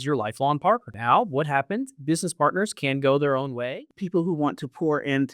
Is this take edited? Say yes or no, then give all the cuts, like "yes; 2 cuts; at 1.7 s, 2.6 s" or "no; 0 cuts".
yes; 2 cuts; at 0.9 s, 3.7 s